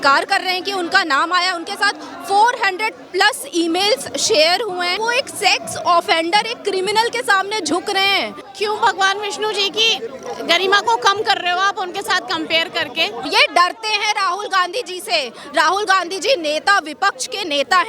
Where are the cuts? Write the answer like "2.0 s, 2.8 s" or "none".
5.0 s, 8.4 s, 13.2 s